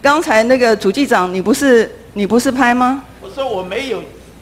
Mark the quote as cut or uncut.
uncut